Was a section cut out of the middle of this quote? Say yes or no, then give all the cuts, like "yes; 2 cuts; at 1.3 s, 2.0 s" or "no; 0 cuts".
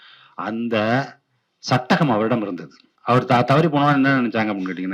yes; 1 cut; at 2.9 s